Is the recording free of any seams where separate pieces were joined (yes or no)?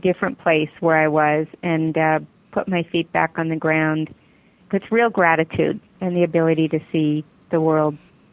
no